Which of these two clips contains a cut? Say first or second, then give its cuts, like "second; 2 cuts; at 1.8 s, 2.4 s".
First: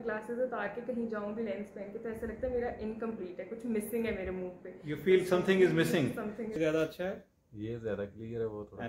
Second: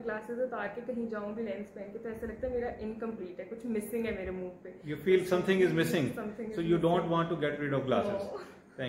first; 1 cut; at 6.5 s